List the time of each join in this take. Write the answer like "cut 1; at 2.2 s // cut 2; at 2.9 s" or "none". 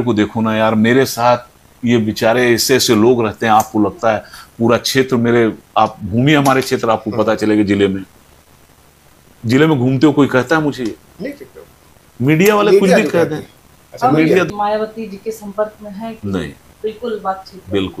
cut 1; at 14.5 s